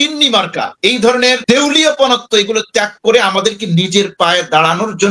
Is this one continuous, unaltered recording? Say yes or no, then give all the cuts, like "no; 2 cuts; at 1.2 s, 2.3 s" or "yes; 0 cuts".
yes; 0 cuts